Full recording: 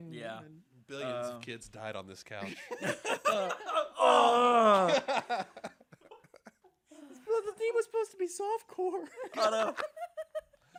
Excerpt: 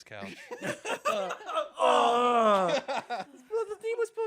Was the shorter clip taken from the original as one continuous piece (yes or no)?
no